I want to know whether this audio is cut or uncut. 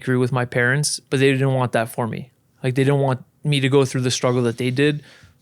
cut